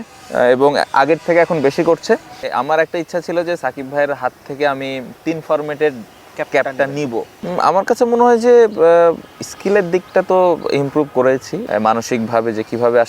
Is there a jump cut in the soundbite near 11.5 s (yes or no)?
yes